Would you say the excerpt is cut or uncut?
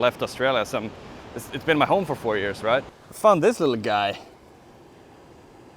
cut